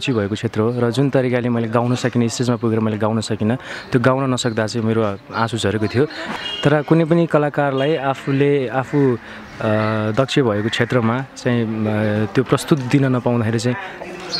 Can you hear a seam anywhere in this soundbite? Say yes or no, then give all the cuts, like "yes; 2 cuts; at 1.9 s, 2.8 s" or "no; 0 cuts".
yes; 1 cut; at 6.4 s